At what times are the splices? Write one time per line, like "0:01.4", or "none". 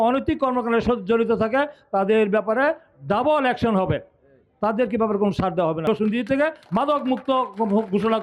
0:05.9